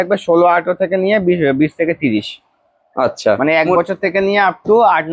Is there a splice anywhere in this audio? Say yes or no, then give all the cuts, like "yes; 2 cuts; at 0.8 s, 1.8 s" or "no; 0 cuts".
no; 0 cuts